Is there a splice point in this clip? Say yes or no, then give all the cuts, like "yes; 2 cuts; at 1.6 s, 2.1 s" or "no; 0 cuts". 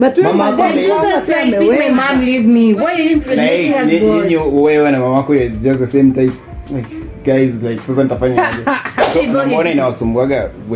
yes; 1 cut; at 8.9 s